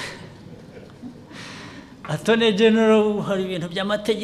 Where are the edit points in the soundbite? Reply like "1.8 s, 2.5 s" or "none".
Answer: none